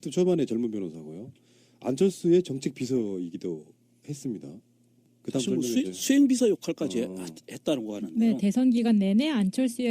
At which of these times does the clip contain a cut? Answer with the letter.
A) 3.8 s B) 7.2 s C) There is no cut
B